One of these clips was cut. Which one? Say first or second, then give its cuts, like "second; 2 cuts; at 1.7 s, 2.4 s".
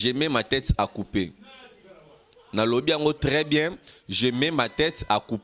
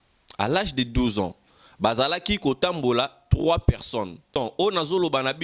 second; 1 cut; at 4.3 s